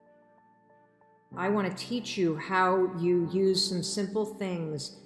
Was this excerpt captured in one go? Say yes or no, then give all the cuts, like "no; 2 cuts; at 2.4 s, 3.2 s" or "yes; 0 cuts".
no; 1 cut; at 1.3 s